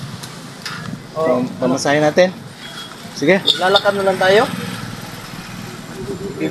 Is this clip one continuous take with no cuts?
yes; 0 cuts

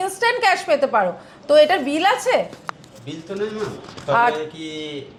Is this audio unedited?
yes; 0 cuts

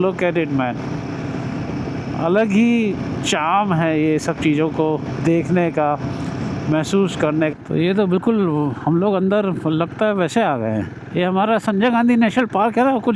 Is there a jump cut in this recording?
yes; 2 cuts; at 7.5 s, 11.0 s

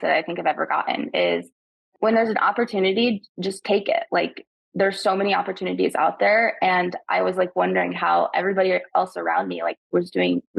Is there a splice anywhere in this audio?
yes; 1 cut; at 1.9 s

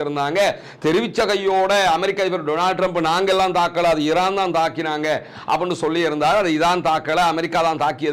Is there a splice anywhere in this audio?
no; 0 cuts

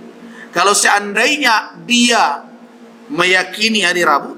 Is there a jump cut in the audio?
no; 0 cuts

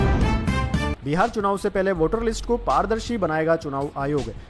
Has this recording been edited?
yes; 1 cut; at 1.0 s

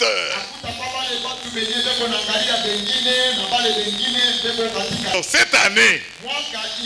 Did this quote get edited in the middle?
yes; 1 cut; at 5.1 s

